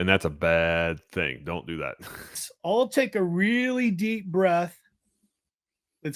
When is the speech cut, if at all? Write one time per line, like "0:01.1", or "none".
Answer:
0:02.5